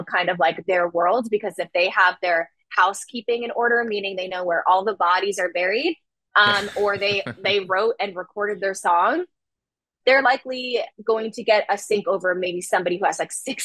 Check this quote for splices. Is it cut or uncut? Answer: uncut